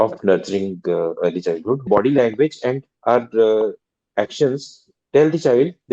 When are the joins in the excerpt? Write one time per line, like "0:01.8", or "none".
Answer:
0:01.8